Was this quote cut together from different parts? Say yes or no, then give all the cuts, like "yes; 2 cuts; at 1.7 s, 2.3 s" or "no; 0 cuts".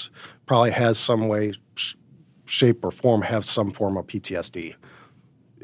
no; 0 cuts